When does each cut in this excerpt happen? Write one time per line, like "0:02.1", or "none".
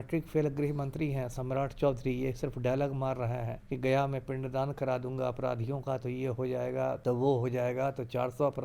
0:03.6
0:07.0